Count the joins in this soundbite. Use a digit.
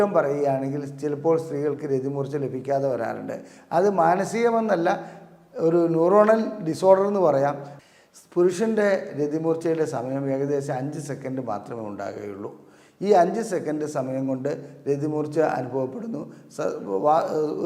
1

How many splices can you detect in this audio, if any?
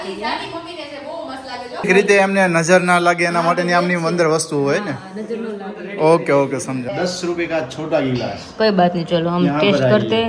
2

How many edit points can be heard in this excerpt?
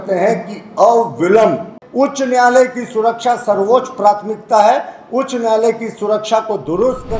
1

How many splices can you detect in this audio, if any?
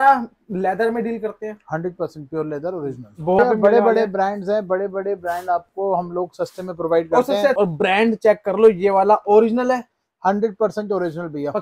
2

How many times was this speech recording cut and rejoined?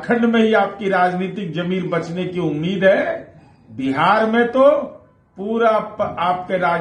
0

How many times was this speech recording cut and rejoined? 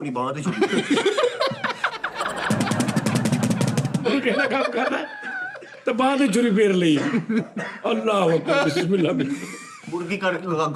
0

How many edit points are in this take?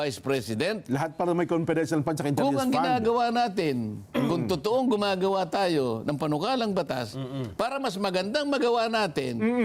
0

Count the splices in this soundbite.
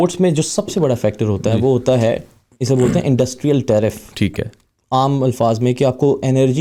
0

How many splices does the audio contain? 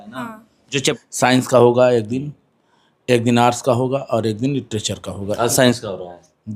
1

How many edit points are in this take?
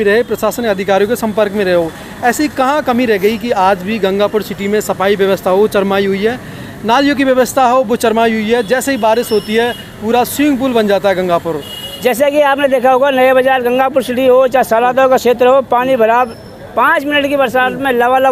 0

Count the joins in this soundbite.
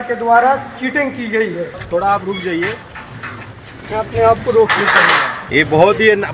2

